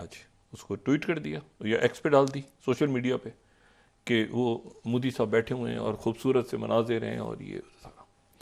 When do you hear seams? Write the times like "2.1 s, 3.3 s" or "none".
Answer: none